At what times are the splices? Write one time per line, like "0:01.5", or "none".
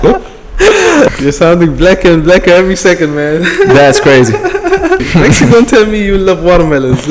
0:01.1
0:05.1